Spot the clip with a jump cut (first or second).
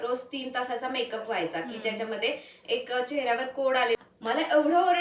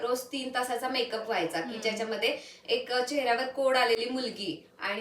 first